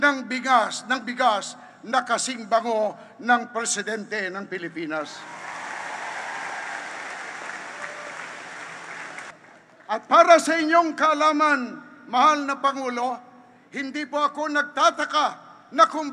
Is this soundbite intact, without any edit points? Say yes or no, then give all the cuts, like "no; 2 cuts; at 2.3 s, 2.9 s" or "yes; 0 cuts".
no; 1 cut; at 9.3 s